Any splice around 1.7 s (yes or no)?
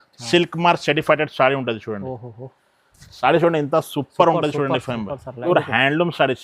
no